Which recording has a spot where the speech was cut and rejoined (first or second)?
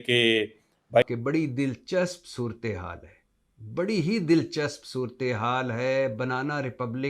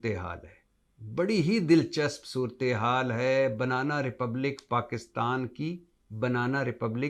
first